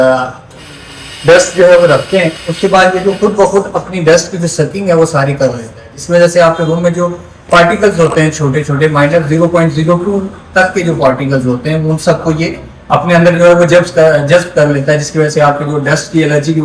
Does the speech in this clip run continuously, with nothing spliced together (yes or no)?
yes